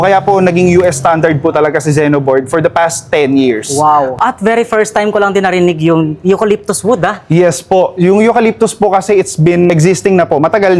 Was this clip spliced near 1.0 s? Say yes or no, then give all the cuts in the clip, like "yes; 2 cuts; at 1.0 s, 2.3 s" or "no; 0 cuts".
no; 2 cuts; at 4.1 s, 9.7 s